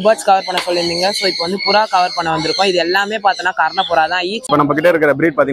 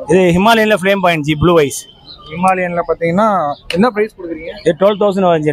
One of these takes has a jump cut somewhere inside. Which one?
first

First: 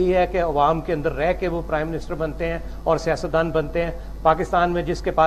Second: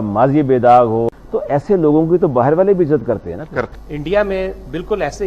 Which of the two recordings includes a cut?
second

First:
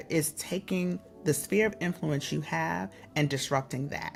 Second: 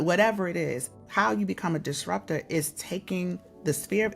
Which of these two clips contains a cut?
second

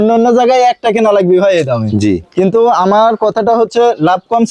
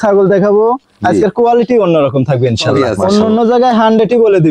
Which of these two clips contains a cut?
second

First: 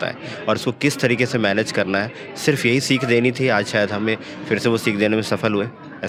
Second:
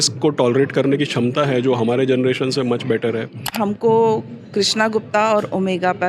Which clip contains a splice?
second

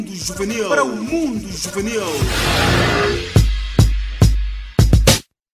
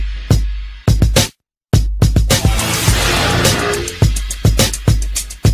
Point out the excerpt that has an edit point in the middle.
second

